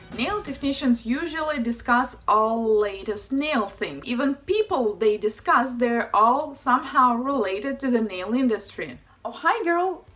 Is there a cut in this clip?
yes; 1 cut; at 2.5 s

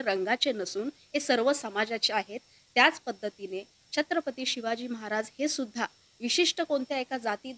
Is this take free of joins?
yes; 0 cuts

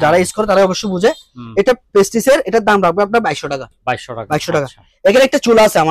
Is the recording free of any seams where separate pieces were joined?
yes; 0 cuts

